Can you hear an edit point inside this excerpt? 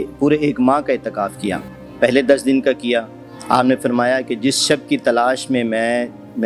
no; 0 cuts

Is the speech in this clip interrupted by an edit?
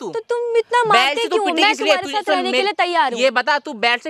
no; 0 cuts

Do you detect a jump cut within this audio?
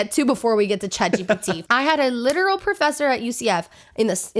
yes; 1 cut; at 1.6 s

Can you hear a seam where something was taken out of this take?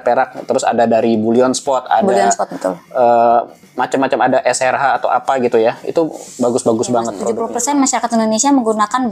yes; 1 cut; at 7.8 s

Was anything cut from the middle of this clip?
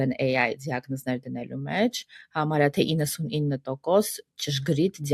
no; 0 cuts

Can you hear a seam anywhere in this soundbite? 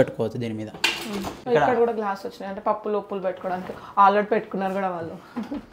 yes; 1 cut; at 1.3 s

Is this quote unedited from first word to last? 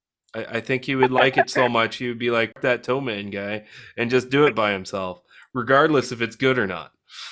no; 1 cut; at 2.6 s

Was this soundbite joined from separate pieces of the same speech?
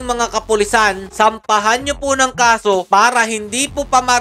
yes; 1 cut; at 2.8 s

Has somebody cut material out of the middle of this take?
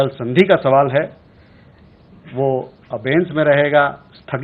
no; 0 cuts

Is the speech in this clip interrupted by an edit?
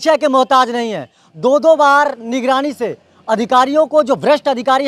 no; 0 cuts

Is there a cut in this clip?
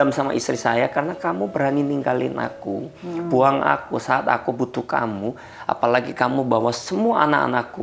no; 0 cuts

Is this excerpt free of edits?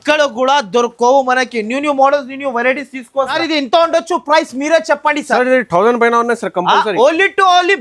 yes; 0 cuts

